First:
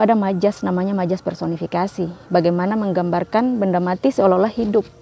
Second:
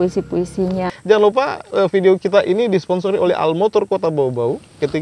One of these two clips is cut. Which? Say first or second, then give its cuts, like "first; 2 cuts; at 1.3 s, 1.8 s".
second; 1 cut; at 0.9 s